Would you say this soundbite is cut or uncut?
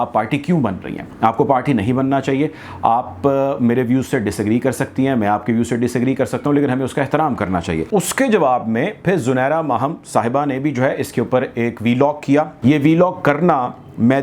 cut